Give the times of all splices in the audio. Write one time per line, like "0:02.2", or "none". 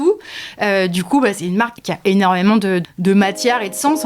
0:01.8
0:02.9